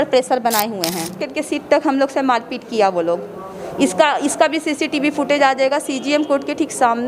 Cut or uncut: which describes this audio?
cut